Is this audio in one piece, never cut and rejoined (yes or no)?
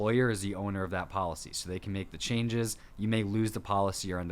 no